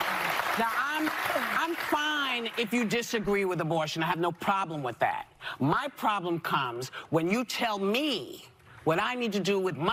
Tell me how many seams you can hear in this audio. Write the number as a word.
zero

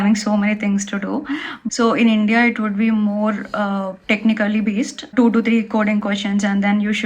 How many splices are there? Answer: two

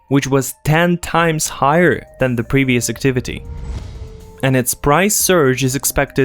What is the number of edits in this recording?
one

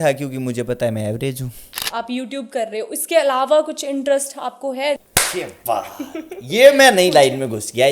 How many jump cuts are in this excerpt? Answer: two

